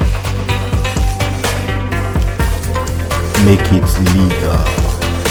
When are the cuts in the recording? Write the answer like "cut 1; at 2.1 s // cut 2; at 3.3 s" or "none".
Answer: none